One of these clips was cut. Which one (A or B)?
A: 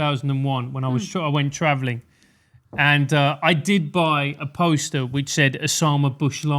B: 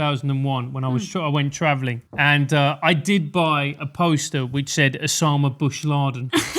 B